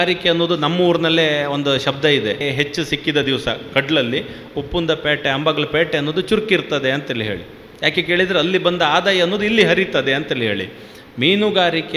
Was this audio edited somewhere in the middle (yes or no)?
yes